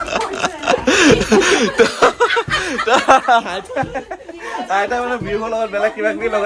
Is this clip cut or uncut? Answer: uncut